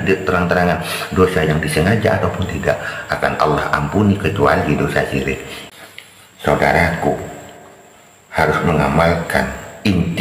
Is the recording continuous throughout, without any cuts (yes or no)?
no